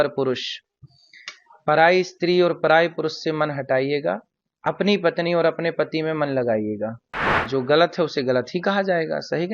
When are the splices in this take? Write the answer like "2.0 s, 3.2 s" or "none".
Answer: 7.4 s